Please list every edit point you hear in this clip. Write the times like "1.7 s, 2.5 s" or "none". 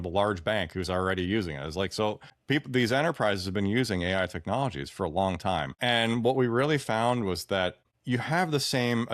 2.3 s, 5.7 s, 7.9 s